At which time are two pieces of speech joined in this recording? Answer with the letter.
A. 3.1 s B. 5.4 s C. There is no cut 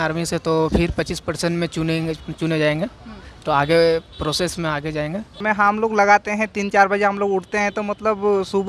B